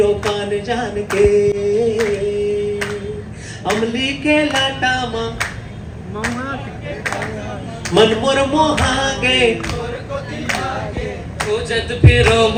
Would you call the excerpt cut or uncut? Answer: uncut